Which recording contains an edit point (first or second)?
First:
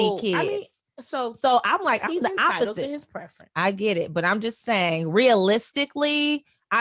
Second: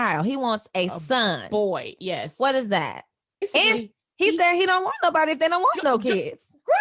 second